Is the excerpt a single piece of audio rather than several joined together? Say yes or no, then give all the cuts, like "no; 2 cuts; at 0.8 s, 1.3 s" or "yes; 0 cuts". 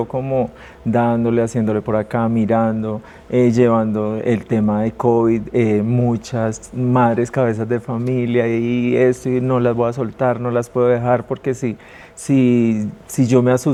yes; 0 cuts